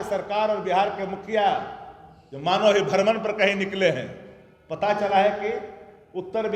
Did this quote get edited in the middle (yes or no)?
no